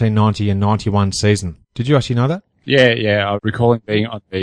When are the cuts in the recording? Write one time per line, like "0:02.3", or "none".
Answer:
none